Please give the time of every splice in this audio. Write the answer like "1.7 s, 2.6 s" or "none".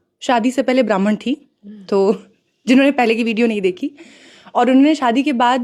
none